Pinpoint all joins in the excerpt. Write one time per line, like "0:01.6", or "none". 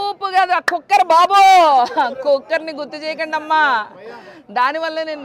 none